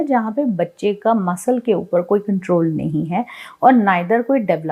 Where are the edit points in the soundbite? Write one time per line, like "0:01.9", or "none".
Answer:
none